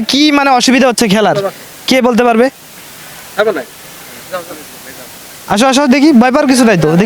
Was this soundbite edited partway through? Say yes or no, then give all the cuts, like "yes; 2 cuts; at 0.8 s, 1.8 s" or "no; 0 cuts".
no; 0 cuts